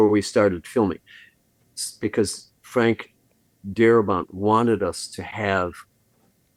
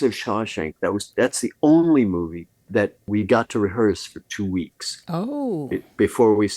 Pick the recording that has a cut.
second; 1 cut; at 3.0 s

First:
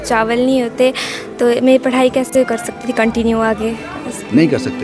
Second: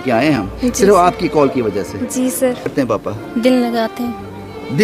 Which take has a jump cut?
second; 1 cut; at 2.7 s

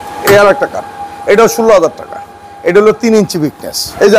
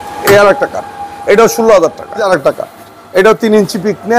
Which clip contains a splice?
second; 1 cut; at 2.3 s

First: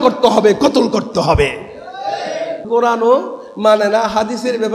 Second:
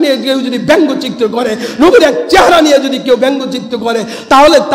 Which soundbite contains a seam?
first; 1 cut; at 2.6 s

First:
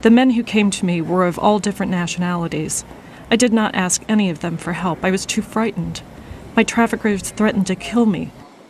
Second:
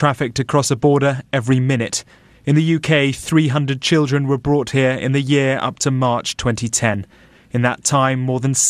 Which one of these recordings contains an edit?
second; 1 cut; at 4.0 s

